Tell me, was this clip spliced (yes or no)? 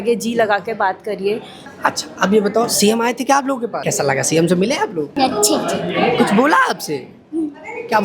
yes